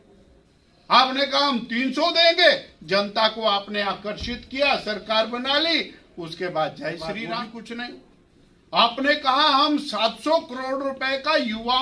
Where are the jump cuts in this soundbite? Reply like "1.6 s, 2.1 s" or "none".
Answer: 7.3 s